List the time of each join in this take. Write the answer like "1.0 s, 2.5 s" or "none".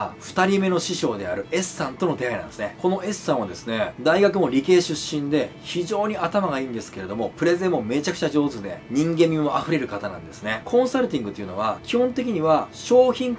none